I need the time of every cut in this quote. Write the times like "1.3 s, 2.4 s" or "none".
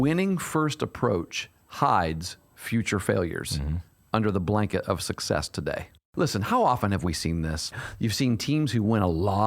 6.1 s, 7.7 s